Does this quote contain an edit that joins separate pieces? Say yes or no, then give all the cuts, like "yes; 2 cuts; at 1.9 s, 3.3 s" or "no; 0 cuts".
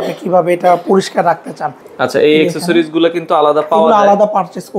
yes; 1 cut; at 1.8 s